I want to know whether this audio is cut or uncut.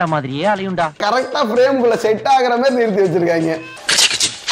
cut